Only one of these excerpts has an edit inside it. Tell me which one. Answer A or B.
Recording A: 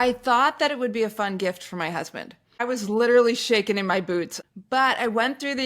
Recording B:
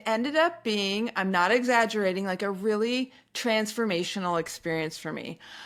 A